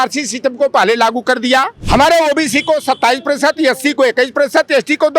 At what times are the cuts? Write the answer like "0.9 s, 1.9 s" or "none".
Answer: 1.8 s